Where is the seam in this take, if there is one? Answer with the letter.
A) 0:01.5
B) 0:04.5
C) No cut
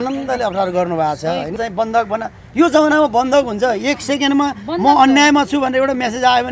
A